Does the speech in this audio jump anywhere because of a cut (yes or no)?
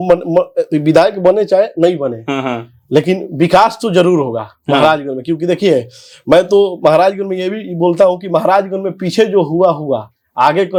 no